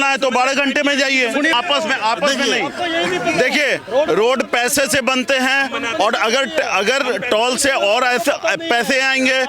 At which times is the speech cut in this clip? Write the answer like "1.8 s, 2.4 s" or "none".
1.5 s